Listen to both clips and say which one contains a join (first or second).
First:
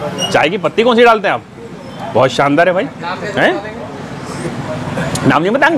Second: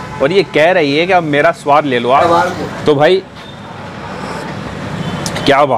second